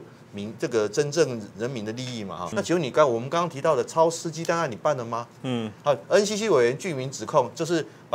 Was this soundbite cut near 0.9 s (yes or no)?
no